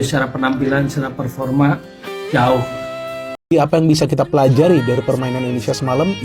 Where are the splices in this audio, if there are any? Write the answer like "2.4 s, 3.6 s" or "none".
3.3 s